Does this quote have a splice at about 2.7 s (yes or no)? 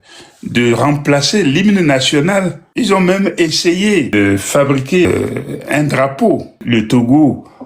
yes